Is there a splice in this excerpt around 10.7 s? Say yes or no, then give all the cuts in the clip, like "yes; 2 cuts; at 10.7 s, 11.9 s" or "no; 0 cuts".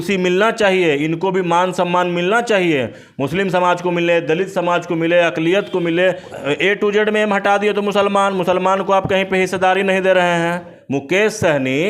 yes; 2 cuts; at 6.3 s, 10.7 s